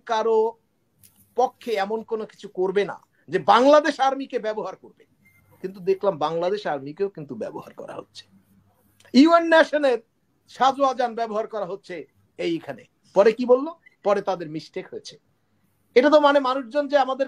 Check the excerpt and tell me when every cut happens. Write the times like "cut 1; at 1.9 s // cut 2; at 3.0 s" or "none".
none